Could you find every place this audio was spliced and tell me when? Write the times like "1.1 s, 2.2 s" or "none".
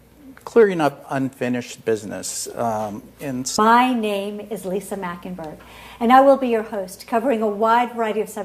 none